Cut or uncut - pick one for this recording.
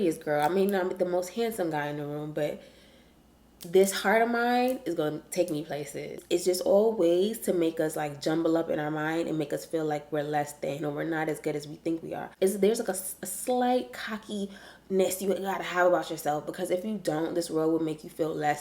cut